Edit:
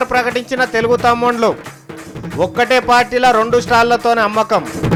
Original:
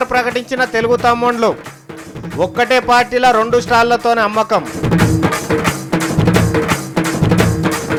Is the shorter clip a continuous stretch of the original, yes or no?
yes